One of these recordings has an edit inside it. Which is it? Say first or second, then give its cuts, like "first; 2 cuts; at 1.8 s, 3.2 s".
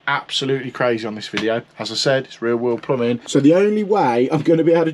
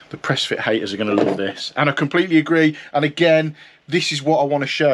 first; 2 cuts; at 1.6 s, 3.2 s